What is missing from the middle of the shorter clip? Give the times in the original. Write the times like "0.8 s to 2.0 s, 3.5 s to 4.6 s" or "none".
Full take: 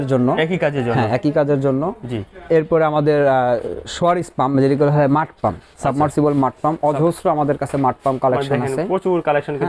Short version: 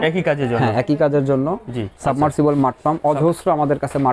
2.3 s to 5.7 s

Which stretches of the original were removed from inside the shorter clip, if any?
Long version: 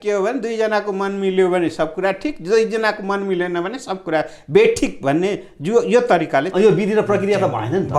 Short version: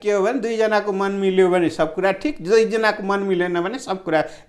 none

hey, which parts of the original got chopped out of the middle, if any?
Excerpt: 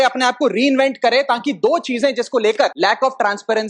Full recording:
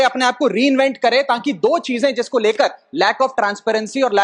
2.7 s to 2.9 s

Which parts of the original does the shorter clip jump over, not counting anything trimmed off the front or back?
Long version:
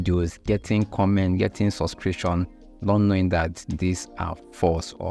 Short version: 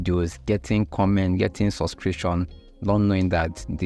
none

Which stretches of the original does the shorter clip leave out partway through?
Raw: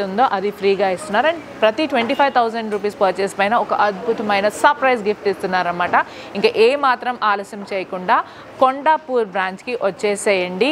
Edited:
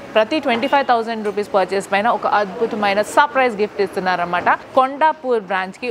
6.1 s to 8.5 s

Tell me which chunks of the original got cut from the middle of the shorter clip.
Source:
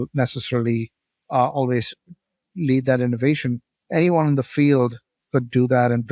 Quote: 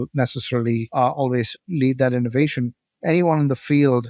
0.9 s to 1.2 s, 2.0 s to 2.5 s

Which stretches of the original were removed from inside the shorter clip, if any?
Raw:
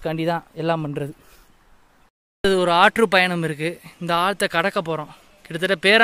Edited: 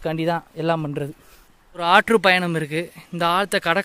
1.8 s to 2.7 s

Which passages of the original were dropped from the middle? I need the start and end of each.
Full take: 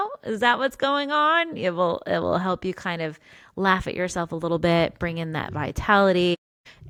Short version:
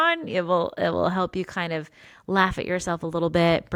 none

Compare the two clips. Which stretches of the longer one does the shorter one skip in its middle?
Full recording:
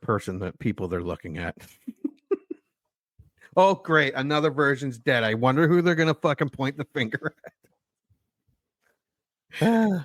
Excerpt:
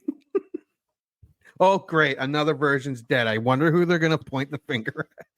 6.2 s to 6.5 s

